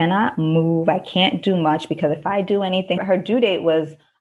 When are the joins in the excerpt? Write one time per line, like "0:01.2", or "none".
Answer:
0:03.0